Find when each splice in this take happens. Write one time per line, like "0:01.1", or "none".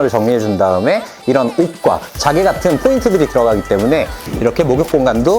0:04.2